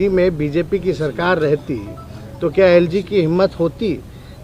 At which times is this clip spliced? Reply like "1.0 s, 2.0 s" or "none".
none

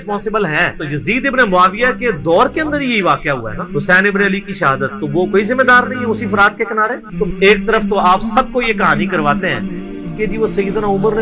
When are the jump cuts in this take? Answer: 7.2 s

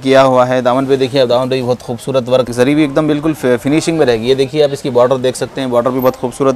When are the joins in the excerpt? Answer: 2.5 s

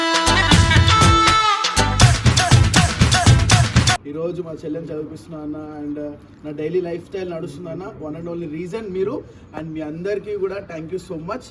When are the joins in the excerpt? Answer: 4.1 s

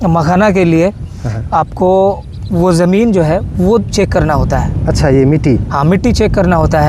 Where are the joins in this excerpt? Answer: none

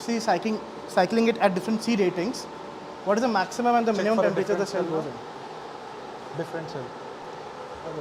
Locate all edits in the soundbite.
none

